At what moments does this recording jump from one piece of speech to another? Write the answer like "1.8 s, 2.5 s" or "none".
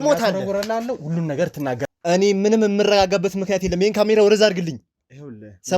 1.8 s